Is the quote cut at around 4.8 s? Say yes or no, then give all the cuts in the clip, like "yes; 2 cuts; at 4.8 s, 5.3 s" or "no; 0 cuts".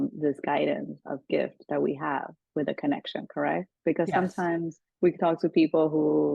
yes; 1 cut; at 4.8 s